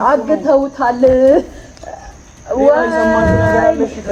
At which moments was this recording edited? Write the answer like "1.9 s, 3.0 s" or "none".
none